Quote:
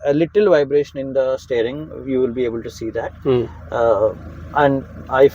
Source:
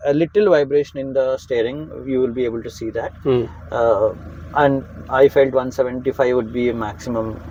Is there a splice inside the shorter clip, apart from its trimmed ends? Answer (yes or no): no